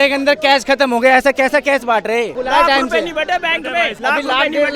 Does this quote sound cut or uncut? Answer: cut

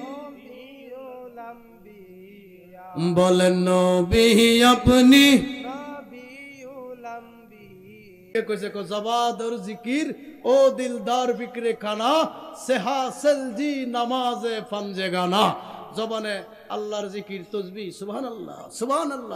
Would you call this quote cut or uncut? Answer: cut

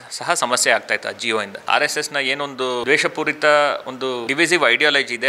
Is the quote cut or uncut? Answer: cut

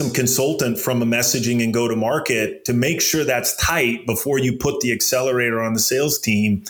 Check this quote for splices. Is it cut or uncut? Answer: uncut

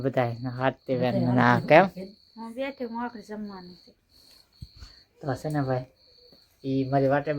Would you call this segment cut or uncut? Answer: uncut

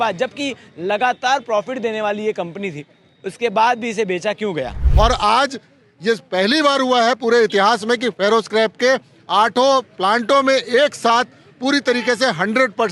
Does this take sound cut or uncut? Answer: cut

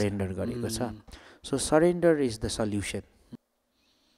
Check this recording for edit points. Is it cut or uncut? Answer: cut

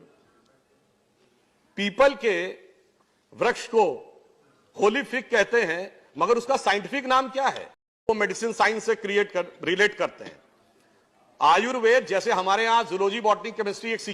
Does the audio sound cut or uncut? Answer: cut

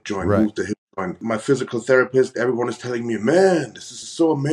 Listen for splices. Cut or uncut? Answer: cut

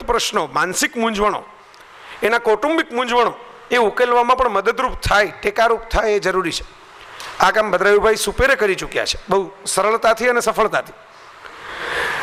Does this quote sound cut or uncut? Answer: uncut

